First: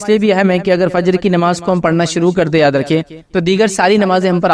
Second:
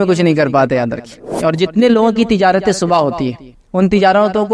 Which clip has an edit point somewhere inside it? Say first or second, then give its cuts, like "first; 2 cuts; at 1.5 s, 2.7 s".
second; 1 cut; at 1.3 s